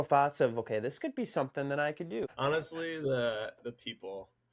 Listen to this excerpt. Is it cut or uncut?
cut